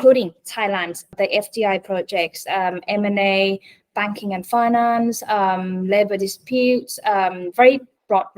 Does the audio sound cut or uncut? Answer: cut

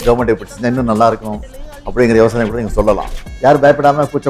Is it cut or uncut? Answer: uncut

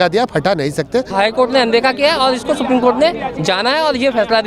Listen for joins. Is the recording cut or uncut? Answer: cut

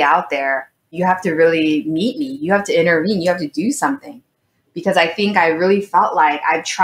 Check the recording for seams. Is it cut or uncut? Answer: cut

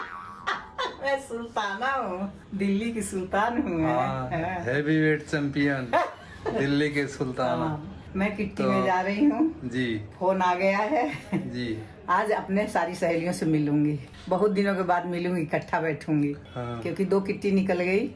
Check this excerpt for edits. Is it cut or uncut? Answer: uncut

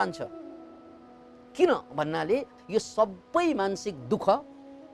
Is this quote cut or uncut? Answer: cut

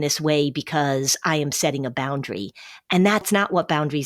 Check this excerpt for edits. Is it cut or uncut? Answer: uncut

